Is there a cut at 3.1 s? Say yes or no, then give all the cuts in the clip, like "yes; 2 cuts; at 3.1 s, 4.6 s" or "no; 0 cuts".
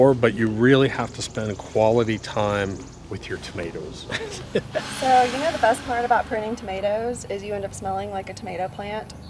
no; 1 cut; at 4.9 s